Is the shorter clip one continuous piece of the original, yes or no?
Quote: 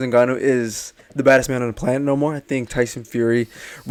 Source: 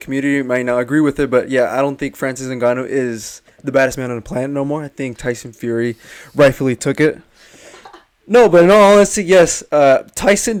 yes